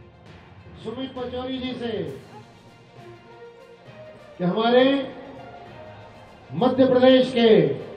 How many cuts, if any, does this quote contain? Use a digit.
3